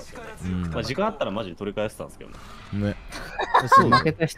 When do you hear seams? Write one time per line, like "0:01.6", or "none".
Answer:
none